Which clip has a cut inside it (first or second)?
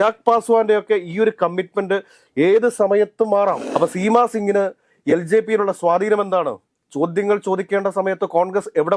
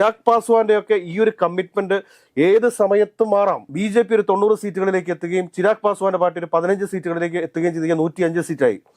first